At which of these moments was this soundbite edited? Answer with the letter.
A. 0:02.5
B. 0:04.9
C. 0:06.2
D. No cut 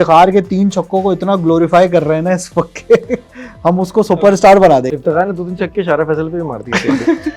B